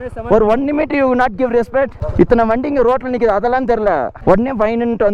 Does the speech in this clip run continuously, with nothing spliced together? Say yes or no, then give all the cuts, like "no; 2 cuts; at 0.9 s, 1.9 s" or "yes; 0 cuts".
no; 2 cuts; at 2.0 s, 4.1 s